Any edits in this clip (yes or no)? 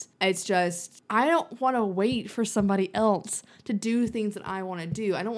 yes